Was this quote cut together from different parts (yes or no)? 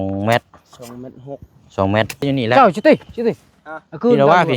yes